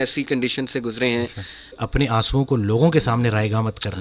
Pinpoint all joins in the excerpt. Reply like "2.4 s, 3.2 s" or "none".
1.8 s